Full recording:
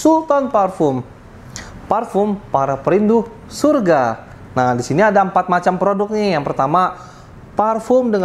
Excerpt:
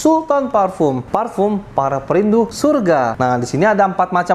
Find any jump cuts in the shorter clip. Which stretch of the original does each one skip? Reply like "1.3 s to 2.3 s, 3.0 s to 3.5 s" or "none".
1.0 s to 1.8 s, 3.3 s to 3.5 s, 4.1 s to 4.5 s